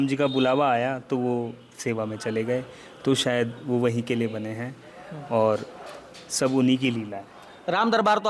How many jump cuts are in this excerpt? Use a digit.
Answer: 0